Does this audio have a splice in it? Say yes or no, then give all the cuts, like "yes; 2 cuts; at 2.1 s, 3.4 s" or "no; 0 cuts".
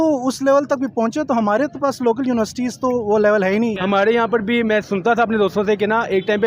yes; 1 cut; at 3.8 s